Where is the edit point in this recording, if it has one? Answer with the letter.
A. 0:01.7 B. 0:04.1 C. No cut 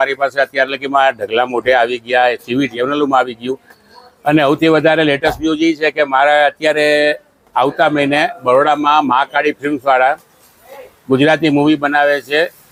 C